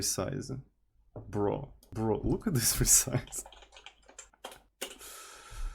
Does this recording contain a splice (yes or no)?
yes